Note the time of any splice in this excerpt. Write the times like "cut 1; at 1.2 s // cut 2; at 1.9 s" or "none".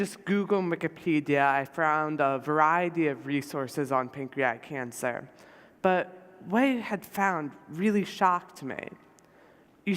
cut 1; at 3.2 s